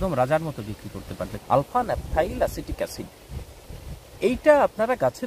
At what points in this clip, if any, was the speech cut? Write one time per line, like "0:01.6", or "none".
0:01.3